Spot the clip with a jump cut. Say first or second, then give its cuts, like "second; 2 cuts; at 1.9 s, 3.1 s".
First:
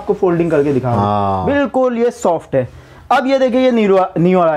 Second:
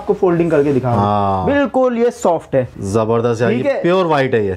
second; 1 cut; at 2.8 s